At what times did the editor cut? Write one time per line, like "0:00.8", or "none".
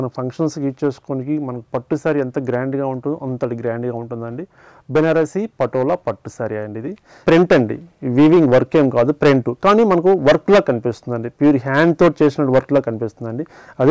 0:07.2